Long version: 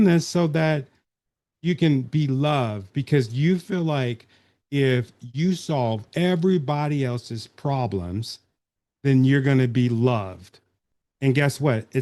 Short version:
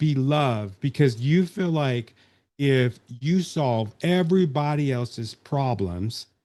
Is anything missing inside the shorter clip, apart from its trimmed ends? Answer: no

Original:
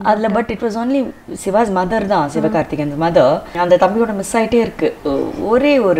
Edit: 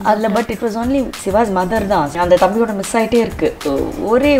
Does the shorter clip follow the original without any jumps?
no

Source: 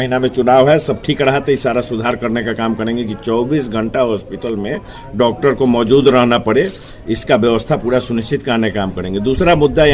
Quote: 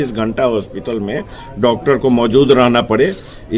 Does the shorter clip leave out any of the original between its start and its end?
no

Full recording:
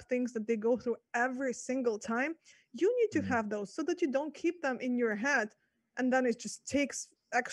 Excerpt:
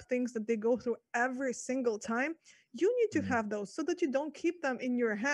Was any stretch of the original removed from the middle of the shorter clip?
no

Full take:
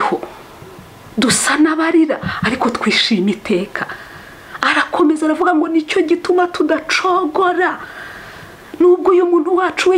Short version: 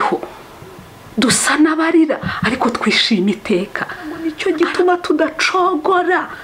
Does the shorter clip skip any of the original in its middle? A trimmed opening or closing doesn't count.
yes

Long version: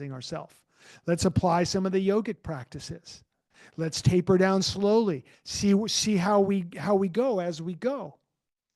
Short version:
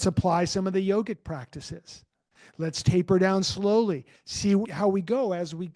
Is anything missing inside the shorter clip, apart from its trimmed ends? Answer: yes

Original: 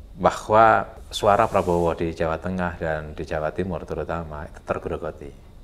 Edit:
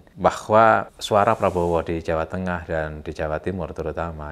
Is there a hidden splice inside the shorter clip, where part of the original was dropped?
yes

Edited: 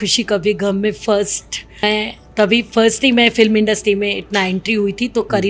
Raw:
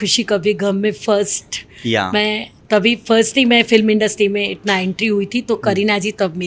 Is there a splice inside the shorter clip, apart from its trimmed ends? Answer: yes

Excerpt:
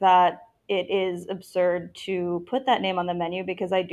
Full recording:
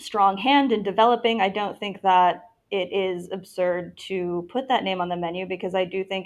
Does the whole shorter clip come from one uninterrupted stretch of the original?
yes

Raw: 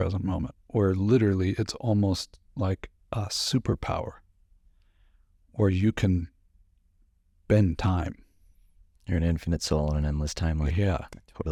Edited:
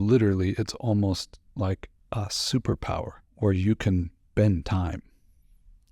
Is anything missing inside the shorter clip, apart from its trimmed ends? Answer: yes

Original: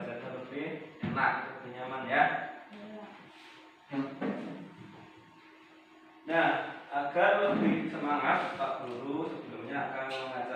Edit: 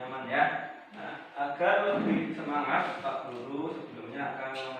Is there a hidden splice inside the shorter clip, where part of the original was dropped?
yes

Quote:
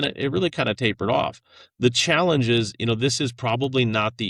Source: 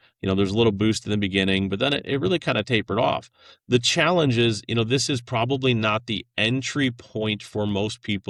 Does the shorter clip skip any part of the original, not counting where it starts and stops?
no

